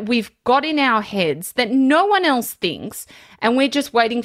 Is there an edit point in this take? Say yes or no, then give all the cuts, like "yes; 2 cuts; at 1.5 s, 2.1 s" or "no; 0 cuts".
no; 0 cuts